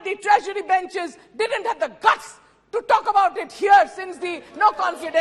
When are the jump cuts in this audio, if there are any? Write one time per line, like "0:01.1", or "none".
none